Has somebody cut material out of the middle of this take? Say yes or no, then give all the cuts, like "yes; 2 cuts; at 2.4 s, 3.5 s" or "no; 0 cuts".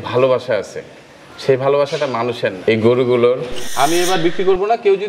yes; 2 cuts; at 2.6 s, 3.6 s